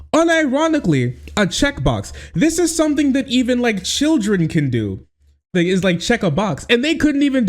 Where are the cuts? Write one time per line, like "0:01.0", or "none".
0:05.5